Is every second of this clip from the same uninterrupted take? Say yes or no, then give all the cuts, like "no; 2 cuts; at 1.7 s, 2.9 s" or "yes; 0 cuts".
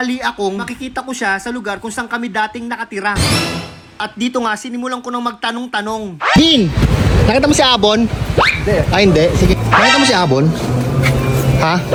yes; 0 cuts